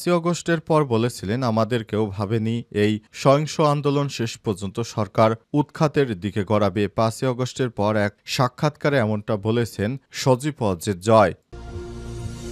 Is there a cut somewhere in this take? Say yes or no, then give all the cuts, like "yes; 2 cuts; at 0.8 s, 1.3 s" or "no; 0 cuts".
yes; 1 cut; at 11.4 s